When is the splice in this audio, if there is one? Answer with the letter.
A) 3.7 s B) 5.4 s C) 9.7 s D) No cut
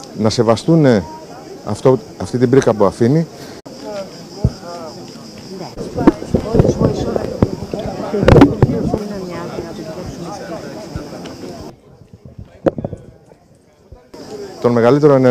D